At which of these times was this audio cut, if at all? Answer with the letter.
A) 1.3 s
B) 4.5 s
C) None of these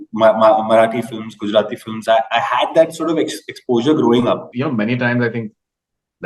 B